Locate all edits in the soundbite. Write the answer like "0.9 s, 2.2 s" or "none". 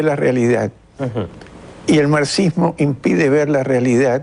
2.1 s